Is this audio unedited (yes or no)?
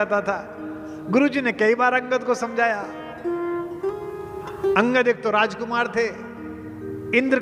yes